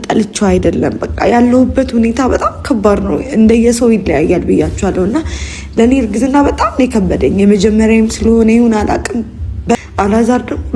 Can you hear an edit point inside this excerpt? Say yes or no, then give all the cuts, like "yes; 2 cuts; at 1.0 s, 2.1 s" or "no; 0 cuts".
yes; 1 cut; at 9.7 s